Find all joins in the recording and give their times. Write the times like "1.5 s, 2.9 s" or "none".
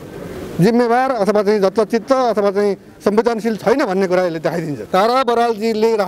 4.8 s